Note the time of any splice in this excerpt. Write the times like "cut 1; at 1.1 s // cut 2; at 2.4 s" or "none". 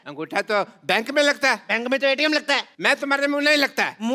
cut 1; at 2.7 s